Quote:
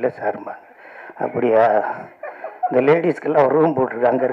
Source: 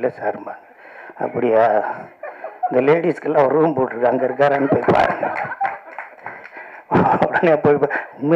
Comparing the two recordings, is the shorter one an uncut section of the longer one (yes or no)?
yes